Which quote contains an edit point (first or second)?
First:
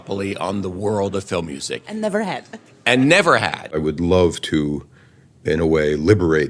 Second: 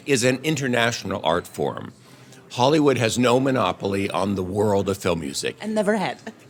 first